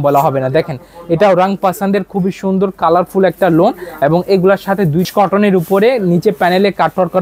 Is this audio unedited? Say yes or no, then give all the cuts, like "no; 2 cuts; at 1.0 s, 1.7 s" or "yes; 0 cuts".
no; 1 cut; at 5.1 s